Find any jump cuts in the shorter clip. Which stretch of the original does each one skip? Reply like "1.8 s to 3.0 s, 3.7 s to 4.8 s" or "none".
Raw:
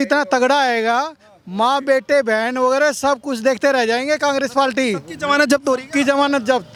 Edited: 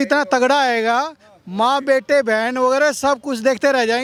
none